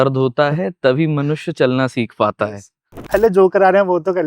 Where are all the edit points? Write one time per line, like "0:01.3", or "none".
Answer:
0:03.1